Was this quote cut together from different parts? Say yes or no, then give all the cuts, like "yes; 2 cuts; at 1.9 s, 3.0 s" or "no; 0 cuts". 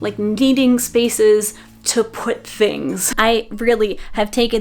yes; 1 cut; at 3.0 s